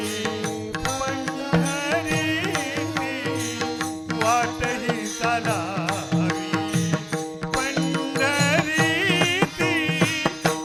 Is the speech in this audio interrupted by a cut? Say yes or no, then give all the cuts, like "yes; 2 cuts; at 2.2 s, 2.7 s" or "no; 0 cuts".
no; 0 cuts